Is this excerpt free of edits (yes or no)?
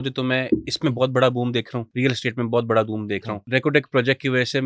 no